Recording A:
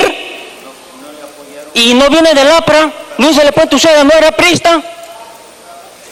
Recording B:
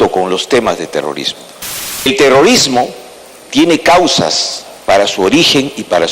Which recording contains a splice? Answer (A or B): B